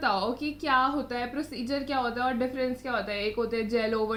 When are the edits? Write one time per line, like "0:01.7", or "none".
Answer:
none